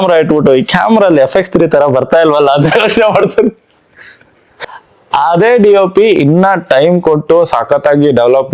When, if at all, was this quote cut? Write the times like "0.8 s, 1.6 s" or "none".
4.4 s